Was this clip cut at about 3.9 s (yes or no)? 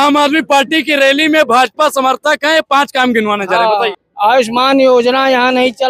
no